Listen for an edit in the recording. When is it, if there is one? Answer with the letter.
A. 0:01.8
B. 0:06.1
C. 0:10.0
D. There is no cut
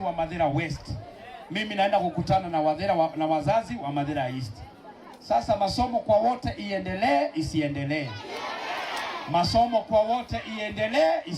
A